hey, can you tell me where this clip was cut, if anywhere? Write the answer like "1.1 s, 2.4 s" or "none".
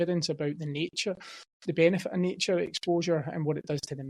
none